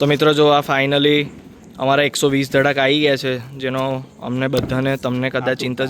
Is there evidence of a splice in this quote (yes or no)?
no